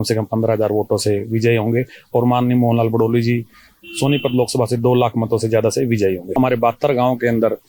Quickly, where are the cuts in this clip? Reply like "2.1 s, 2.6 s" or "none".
6.3 s